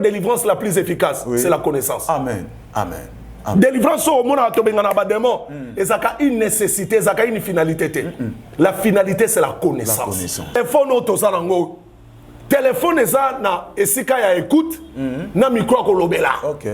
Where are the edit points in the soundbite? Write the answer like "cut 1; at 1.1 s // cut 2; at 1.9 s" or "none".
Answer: cut 1; at 10.5 s